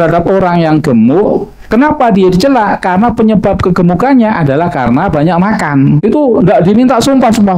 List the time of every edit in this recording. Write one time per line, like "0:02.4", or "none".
0:06.0